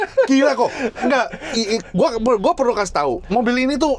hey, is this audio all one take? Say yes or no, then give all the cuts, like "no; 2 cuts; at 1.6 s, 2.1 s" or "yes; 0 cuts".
yes; 0 cuts